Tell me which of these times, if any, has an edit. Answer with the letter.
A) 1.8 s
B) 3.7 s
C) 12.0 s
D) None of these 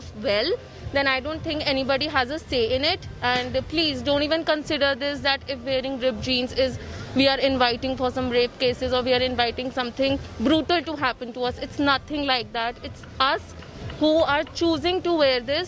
D